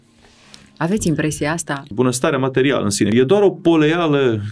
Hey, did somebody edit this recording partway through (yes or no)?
yes